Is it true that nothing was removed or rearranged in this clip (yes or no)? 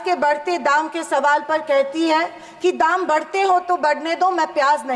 yes